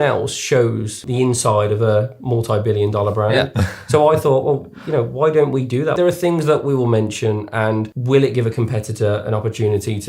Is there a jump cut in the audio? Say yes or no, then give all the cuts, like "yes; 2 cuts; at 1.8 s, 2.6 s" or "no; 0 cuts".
yes; 3 cuts; at 1.0 s, 6.0 s, 7.9 s